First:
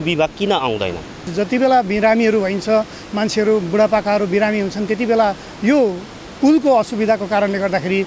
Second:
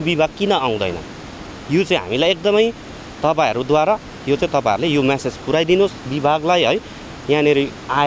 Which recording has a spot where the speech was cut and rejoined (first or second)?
first